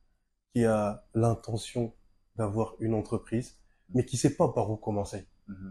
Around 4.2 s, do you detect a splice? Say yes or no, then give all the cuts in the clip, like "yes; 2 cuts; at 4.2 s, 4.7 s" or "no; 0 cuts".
no; 0 cuts